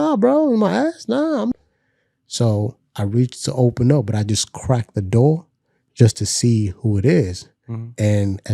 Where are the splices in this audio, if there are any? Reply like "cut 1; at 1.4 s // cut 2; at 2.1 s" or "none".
cut 1; at 1.5 s